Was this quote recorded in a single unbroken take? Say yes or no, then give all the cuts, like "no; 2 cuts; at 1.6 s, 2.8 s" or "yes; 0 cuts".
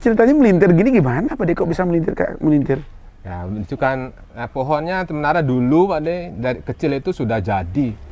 yes; 0 cuts